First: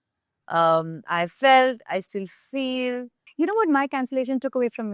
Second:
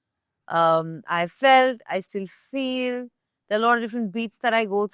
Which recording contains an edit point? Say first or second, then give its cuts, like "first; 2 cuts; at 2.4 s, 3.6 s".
first; 1 cut; at 3.2 s